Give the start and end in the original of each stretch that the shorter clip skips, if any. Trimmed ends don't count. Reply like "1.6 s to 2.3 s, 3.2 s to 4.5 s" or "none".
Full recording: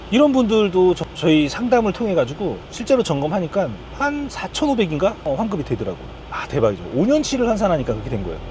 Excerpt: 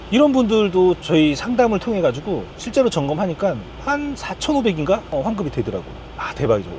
1.0 s to 1.2 s